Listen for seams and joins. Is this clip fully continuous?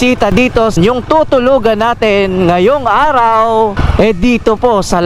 no; 2 cuts; at 0.8 s, 3.8 s

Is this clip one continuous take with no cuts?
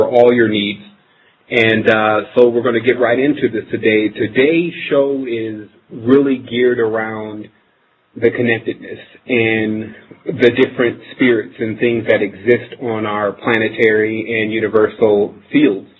yes; 0 cuts

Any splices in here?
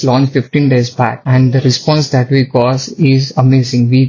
yes; 1 cut; at 1.2 s

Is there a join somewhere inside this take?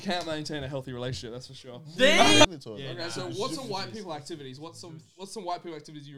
yes; 1 cut; at 2.5 s

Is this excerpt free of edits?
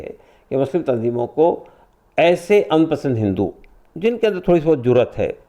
yes; 0 cuts

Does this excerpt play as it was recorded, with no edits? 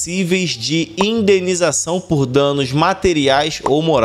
yes; 0 cuts

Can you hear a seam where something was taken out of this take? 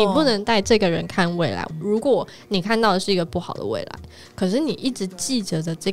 yes; 1 cut; at 1.6 s

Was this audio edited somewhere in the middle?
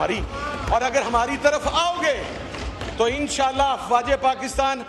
no; 0 cuts

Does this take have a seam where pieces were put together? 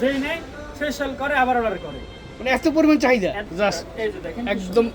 yes; 1 cut; at 3.5 s

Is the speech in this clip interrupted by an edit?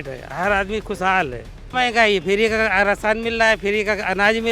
yes; 1 cut; at 1.7 s

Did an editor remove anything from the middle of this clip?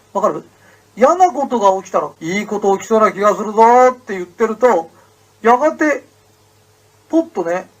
yes; 1 cut; at 2.1 s

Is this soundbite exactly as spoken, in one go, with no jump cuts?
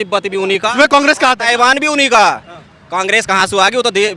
yes; 0 cuts

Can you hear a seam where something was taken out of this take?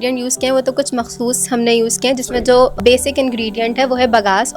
yes; 1 cut; at 2.8 s

